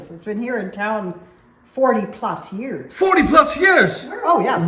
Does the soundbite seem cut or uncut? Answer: uncut